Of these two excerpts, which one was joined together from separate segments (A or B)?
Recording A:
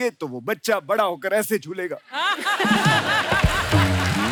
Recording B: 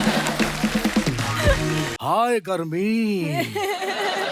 B